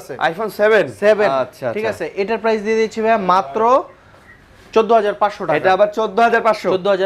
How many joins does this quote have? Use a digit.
0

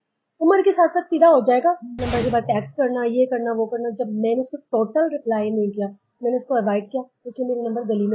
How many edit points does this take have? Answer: 1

